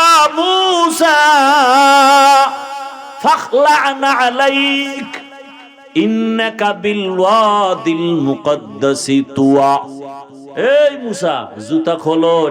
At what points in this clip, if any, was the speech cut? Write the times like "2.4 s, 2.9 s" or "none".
3.1 s